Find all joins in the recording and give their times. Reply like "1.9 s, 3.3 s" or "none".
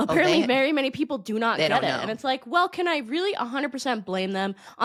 none

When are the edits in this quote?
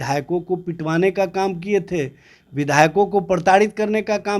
none

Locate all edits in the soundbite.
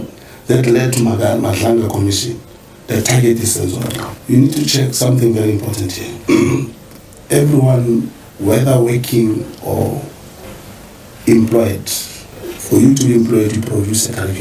none

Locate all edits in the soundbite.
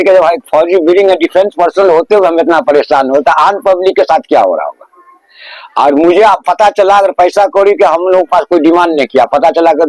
none

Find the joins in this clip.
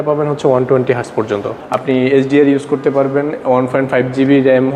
1.6 s

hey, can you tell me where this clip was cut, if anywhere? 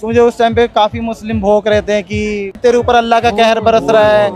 2.5 s

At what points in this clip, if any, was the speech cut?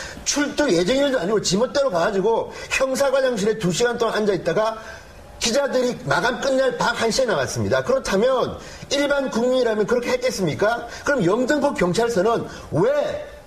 4.4 s

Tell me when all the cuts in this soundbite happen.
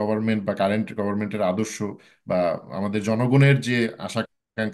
none

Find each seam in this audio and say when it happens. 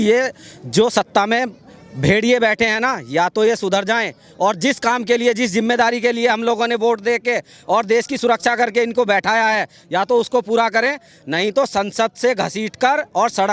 none

